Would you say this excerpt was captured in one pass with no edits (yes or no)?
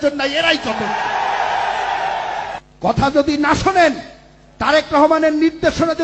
no